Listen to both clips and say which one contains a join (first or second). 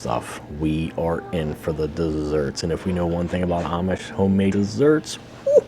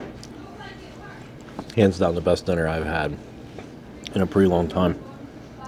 first